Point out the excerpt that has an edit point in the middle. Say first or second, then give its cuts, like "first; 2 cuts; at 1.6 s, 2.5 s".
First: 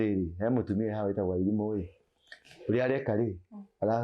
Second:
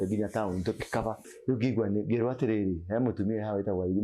second; 1 cut; at 1.3 s